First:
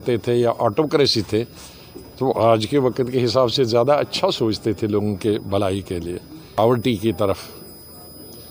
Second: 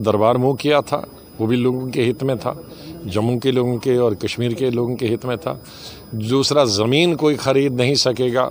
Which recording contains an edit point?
first; 1 cut; at 6.6 s

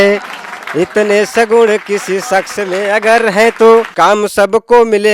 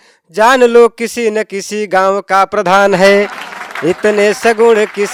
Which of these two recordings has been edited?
first; 1 cut; at 3.9 s

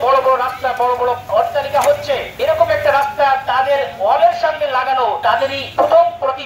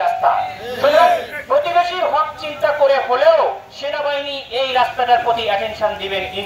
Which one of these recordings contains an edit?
first; 3 cuts; at 1.2 s, 2.3 s, 5.4 s

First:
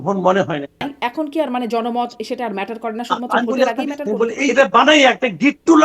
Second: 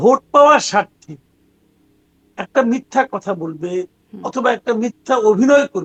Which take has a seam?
first; 2 cuts; at 0.9 s, 4.4 s

